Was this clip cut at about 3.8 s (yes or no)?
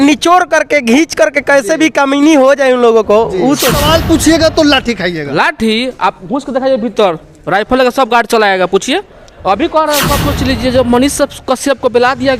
yes